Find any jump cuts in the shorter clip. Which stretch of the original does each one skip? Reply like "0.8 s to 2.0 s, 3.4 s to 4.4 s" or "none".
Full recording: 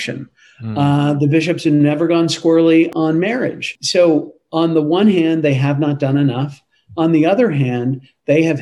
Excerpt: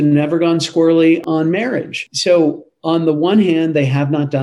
none